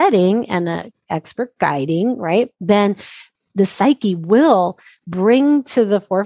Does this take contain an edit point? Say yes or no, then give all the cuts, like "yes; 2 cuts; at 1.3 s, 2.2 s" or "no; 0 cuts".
yes; 1 cut; at 3.2 s